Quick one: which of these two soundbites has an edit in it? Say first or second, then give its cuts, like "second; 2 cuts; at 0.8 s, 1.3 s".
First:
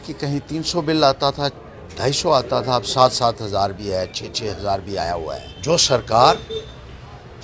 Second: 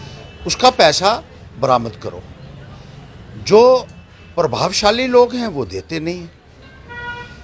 first; 1 cut; at 5.5 s